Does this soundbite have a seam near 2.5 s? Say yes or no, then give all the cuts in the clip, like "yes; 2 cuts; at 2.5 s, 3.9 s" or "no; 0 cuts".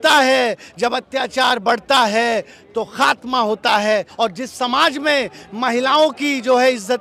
no; 1 cut; at 4.1 s